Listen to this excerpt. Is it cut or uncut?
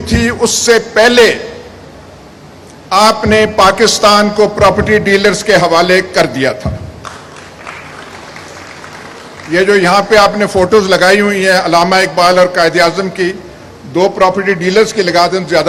uncut